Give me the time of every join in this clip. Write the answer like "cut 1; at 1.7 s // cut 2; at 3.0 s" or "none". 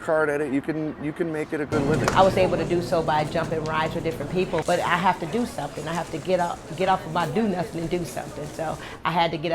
cut 1; at 2.0 s // cut 2; at 4.6 s